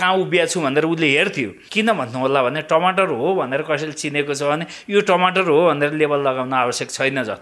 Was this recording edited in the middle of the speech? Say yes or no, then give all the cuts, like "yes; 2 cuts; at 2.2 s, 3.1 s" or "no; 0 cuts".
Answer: yes; 1 cut; at 1.6 s